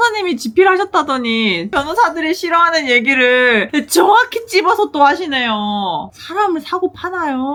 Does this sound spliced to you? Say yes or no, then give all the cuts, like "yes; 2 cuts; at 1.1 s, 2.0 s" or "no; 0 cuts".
no; 0 cuts